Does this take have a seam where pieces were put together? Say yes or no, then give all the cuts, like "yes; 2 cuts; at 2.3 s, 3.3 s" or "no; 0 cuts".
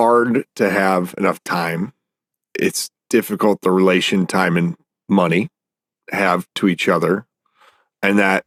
no; 0 cuts